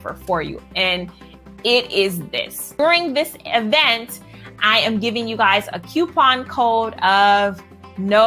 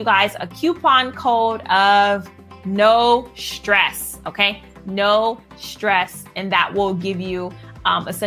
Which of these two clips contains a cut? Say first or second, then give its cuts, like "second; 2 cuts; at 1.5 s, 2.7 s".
first; 1 cut; at 2.7 s